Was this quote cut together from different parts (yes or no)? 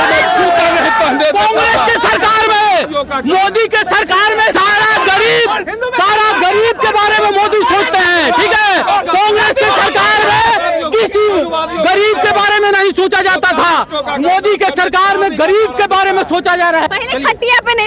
no